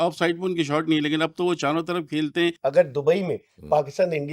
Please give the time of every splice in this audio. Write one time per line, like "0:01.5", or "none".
0:02.6